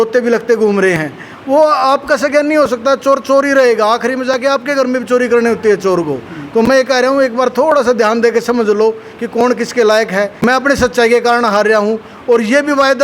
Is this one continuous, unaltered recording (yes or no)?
yes